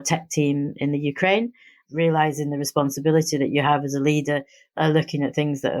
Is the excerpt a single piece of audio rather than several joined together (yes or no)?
no